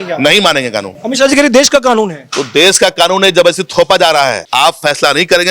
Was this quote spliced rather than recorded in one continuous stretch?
yes; 2 cuts; at 0.9 s, 4.4 s

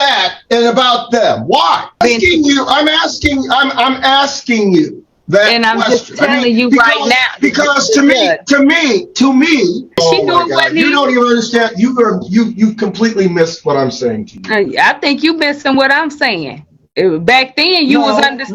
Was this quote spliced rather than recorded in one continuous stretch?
yes; 2 cuts; at 1.9 s, 9.9 s

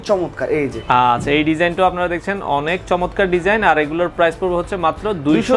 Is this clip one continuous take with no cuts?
yes; 0 cuts

